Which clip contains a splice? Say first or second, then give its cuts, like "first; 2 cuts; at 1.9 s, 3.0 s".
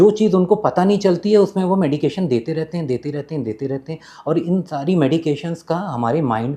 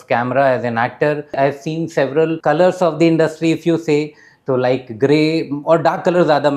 second; 2 cuts; at 1.3 s, 2.4 s